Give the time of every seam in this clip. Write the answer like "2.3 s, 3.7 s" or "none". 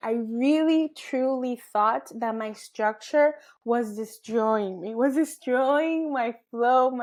none